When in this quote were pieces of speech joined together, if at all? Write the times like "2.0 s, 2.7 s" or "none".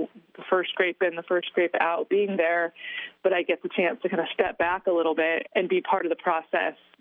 5.4 s